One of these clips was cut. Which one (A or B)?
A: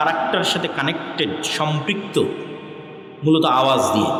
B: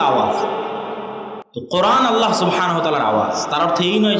B